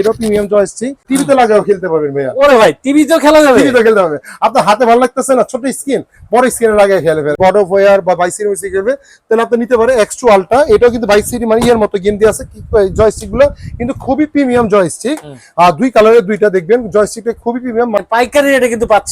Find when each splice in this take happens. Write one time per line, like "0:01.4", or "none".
0:01.0
0:07.4
0:18.0